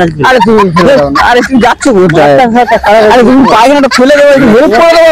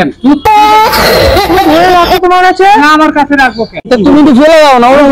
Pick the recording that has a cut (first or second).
second